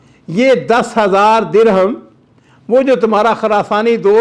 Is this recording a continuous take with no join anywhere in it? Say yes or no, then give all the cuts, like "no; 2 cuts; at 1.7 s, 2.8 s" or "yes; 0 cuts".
yes; 0 cuts